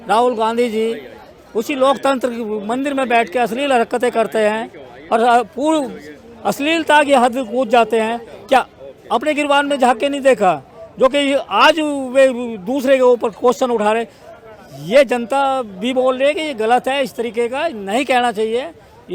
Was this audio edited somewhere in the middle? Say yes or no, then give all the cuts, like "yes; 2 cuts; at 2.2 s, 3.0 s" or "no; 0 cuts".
no; 0 cuts